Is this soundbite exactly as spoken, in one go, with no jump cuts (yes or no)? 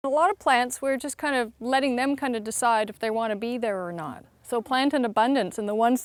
yes